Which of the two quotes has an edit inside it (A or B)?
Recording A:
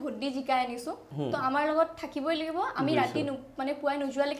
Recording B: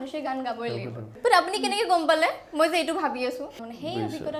B